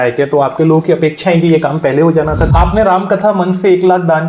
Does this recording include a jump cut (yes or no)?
yes